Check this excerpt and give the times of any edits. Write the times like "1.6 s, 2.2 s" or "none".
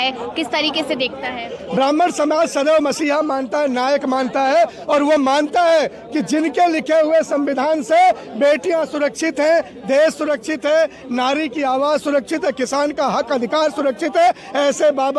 none